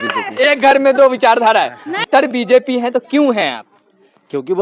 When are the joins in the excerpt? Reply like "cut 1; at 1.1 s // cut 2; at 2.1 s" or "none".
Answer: cut 1; at 2.0 s

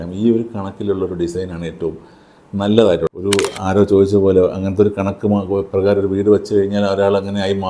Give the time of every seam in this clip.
cut 1; at 3.2 s

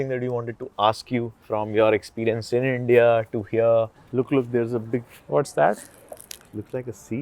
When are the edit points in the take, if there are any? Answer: cut 1; at 3.9 s // cut 2; at 5.2 s

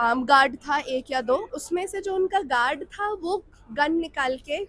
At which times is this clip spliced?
cut 1; at 1.5 s

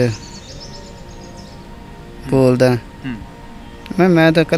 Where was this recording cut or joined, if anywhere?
none

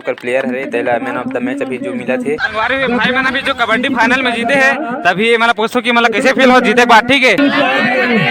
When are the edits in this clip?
cut 1; at 2.4 s // cut 2; at 7.4 s

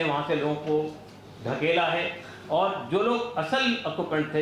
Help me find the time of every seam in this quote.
none

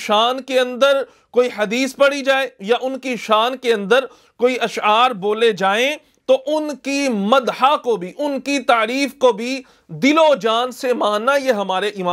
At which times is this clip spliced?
none

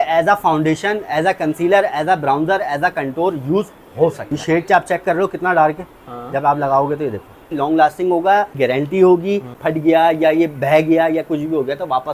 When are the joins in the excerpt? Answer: cut 1; at 4.4 s // cut 2; at 7.5 s // cut 3; at 8.5 s // cut 4; at 9.6 s

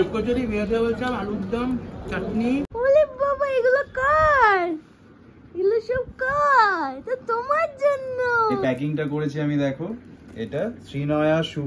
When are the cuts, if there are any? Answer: cut 1; at 2.7 s // cut 2; at 8.6 s

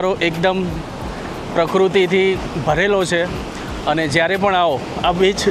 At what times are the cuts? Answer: none

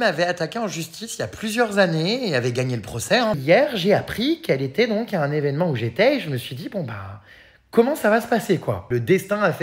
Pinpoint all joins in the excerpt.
cut 1; at 3.4 s // cut 2; at 8.8 s

